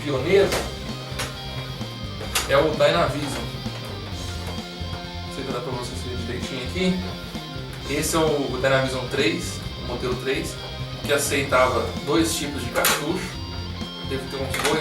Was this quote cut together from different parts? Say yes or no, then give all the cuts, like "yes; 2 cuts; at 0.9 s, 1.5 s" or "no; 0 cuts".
yes; 1 cut; at 12.7 s